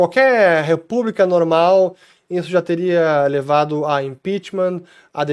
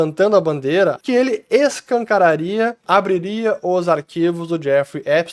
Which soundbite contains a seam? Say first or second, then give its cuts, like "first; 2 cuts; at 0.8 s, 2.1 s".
second; 2 cuts; at 1.0 s, 2.8 s